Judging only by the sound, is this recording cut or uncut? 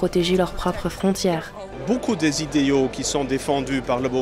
cut